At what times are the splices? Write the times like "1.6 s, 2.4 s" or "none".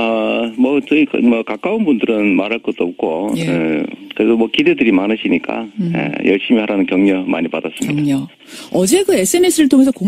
3.7 s